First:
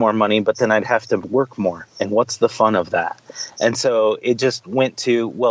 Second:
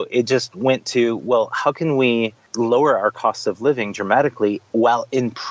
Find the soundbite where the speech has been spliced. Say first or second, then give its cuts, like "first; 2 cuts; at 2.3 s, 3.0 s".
second; 1 cut; at 2.4 s